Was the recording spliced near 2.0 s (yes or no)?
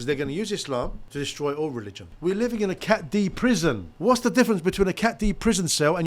yes